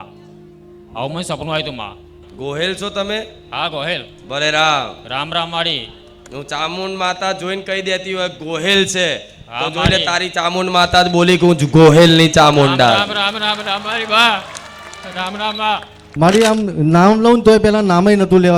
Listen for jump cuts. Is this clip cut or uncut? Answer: cut